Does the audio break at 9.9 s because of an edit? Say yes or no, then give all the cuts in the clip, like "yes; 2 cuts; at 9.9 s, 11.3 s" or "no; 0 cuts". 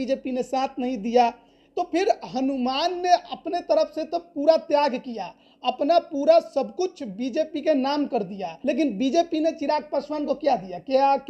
no; 1 cut; at 8.5 s